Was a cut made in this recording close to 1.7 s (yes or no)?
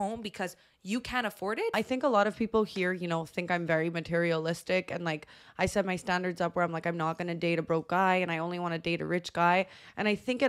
yes